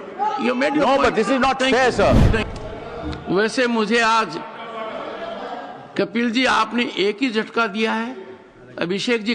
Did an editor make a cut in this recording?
yes; 1 cut; at 2.4 s

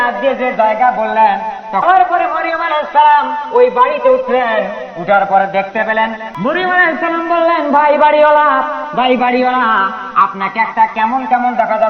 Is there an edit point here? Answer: yes; 2 cuts; at 1.8 s, 6.3 s

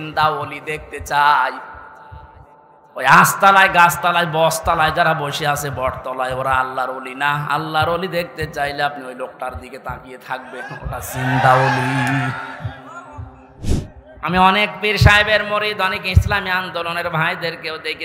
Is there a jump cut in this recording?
yes; 1 cut; at 13.8 s

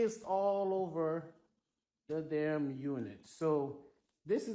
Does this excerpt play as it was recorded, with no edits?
yes; 0 cuts

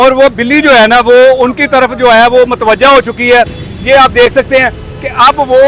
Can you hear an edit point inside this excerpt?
no; 0 cuts

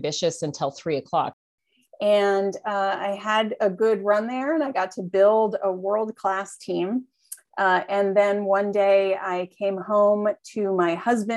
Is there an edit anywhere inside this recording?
yes; 1 cut; at 1.4 s

